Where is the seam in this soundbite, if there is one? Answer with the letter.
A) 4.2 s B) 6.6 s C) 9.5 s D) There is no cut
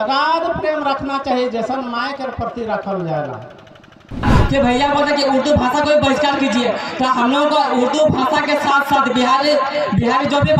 A